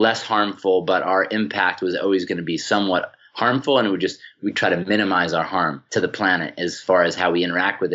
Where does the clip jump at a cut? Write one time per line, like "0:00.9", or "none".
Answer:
0:04.3
0:05.8